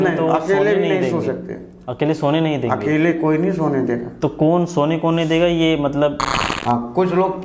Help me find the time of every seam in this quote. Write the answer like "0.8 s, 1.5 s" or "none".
6.2 s